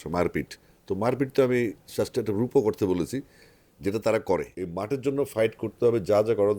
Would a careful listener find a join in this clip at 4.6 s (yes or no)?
yes